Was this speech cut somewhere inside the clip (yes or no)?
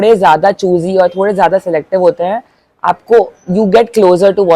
no